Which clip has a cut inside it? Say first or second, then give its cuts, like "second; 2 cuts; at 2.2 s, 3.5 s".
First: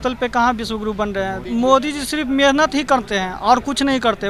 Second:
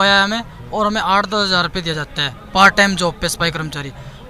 first; 1 cut; at 1.4 s